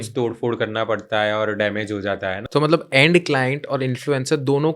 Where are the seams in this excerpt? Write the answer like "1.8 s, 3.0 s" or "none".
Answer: 2.4 s